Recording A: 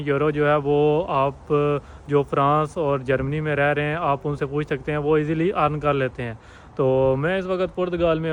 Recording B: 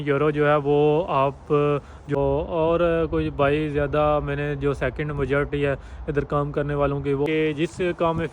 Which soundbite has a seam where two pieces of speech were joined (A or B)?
B